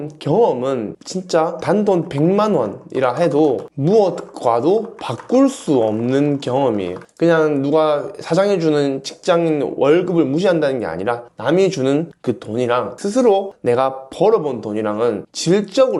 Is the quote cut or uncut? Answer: uncut